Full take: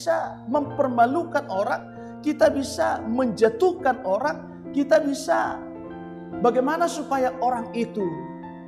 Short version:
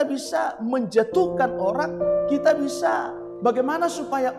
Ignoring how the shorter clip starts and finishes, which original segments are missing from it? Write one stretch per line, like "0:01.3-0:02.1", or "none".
0:05.7-0:06.2